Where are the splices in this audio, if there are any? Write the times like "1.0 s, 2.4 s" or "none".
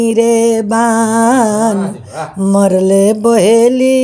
none